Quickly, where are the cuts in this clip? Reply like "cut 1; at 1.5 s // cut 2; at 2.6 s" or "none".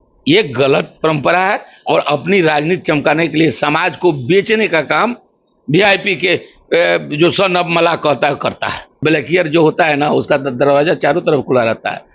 cut 1; at 8.9 s